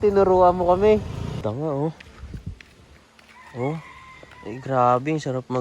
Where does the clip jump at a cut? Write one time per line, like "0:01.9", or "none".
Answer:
0:01.4